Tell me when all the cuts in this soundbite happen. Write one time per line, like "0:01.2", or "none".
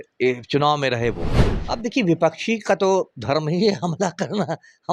0:01.6